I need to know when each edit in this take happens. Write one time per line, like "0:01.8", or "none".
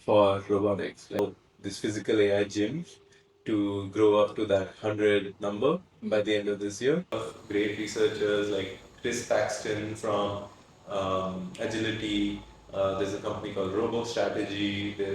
0:01.2
0:07.2

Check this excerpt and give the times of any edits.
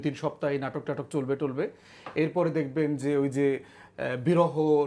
none

